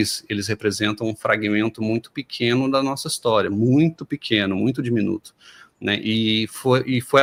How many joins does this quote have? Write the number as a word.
zero